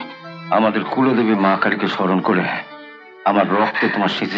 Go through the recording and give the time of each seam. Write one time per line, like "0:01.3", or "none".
none